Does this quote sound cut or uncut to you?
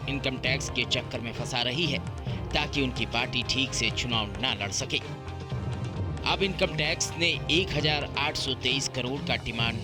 uncut